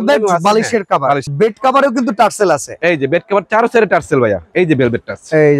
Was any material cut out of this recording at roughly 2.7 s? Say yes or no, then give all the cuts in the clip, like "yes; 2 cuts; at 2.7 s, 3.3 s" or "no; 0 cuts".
no; 2 cuts; at 1.3 s, 4.5 s